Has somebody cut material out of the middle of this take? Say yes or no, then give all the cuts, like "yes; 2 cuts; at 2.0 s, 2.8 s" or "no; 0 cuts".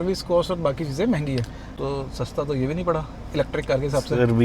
yes; 1 cut; at 1.6 s